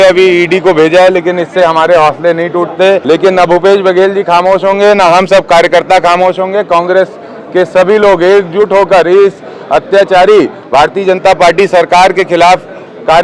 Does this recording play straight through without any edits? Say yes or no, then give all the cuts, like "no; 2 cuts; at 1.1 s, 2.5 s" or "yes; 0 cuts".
no; 1 cut; at 3.0 s